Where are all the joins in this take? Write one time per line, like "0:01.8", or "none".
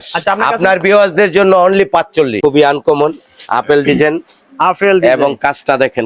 0:02.3